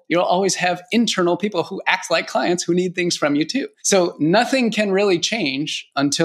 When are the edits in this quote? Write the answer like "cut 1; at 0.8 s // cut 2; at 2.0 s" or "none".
cut 1; at 3.7 s